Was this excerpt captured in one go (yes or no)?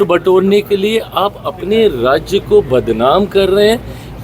yes